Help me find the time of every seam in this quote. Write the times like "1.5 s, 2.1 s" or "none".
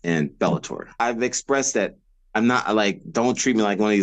0.9 s